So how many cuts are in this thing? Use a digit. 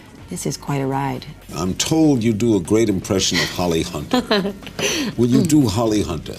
1